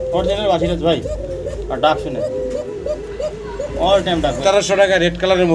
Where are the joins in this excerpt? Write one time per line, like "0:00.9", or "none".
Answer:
0:04.4